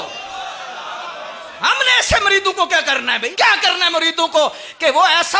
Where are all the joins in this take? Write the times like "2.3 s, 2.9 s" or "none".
1.5 s, 3.3 s